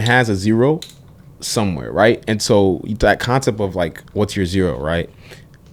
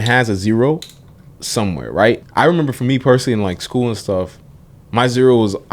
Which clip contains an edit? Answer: second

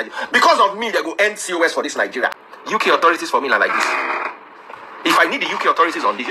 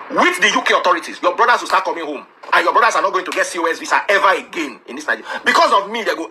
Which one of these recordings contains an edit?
first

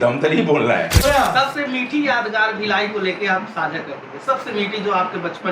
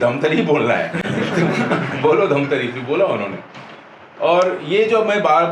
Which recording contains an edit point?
first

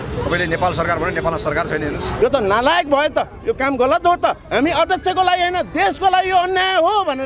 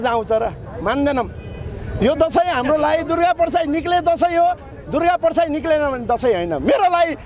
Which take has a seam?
first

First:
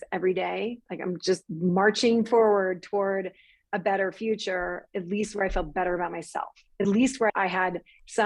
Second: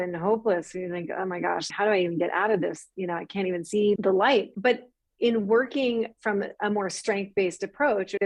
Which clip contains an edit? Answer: second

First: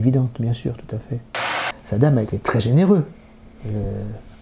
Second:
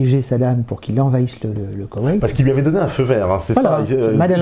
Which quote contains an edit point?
first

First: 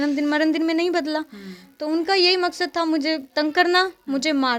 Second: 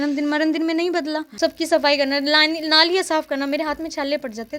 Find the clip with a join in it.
second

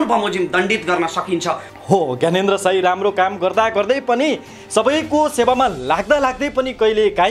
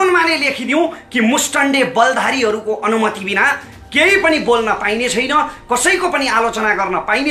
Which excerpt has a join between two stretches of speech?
first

